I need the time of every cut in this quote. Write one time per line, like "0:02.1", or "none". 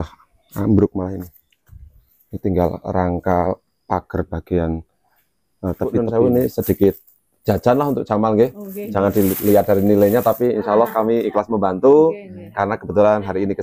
0:06.0